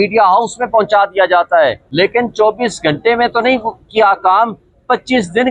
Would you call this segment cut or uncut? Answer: cut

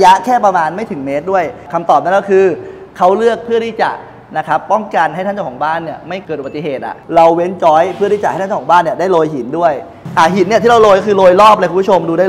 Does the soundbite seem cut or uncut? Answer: cut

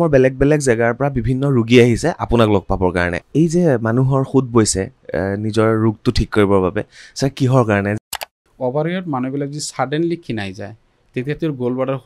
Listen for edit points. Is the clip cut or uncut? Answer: cut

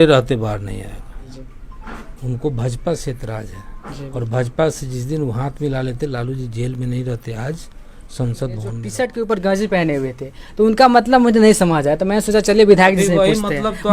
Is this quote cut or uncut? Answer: cut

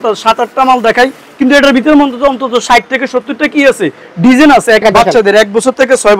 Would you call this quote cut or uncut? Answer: cut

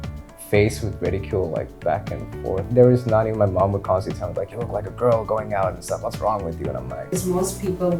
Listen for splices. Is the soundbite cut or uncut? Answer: cut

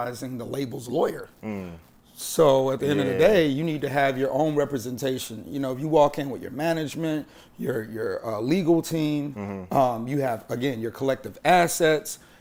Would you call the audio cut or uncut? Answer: uncut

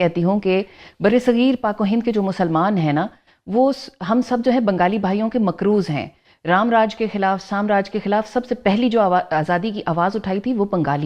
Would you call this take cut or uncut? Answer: uncut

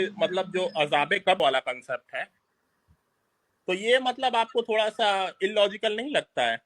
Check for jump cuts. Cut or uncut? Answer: cut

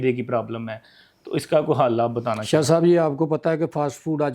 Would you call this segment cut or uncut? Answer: uncut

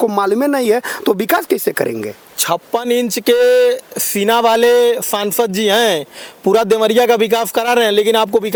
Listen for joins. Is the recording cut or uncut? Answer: uncut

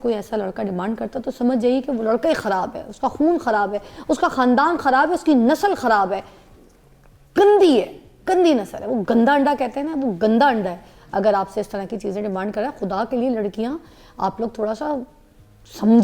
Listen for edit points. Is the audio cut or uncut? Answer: uncut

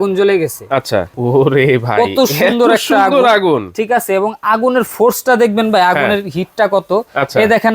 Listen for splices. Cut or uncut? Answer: cut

